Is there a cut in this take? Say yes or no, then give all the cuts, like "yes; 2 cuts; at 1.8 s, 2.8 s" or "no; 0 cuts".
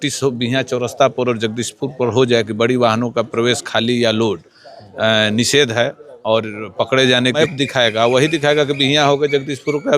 yes; 1 cut; at 7.4 s